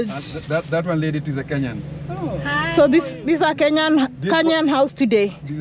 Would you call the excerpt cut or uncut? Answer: uncut